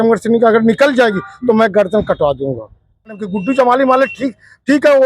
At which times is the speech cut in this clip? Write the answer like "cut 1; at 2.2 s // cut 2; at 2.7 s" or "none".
cut 1; at 3.3 s